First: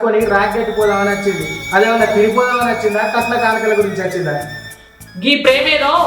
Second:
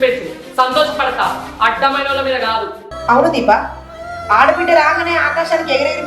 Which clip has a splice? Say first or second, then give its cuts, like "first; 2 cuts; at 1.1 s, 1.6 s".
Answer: second; 1 cut; at 2.9 s